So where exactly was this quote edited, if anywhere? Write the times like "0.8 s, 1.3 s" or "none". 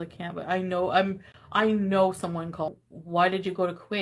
2.8 s

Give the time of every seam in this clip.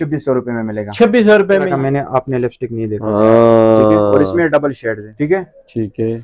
1.7 s, 5.1 s

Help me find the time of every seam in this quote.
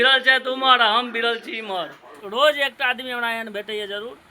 2.2 s

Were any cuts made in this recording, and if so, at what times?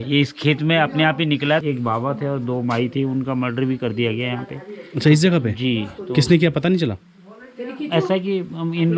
1.6 s

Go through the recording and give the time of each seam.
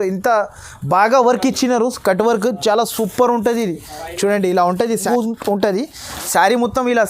5.1 s

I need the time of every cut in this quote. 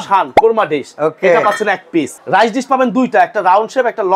2.2 s

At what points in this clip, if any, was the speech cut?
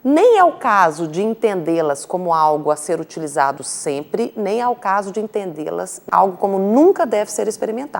6.0 s

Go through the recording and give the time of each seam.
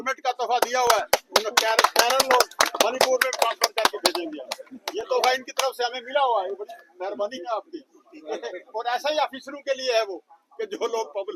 none

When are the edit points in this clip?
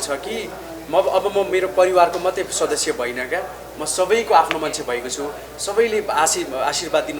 none

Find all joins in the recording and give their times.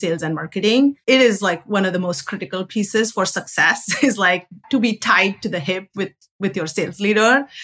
4.6 s

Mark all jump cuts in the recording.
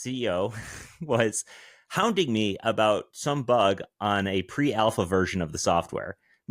none

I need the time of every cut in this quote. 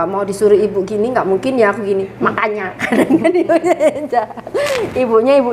none

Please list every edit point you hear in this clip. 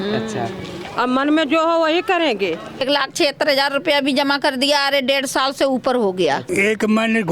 2.8 s, 6.4 s

